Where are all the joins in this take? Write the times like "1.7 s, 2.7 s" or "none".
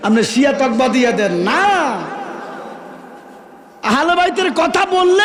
none